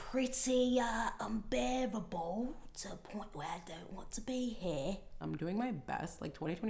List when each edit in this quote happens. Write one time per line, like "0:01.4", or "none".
0:05.1